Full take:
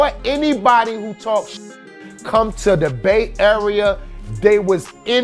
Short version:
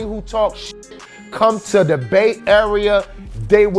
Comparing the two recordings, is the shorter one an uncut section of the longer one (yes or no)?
yes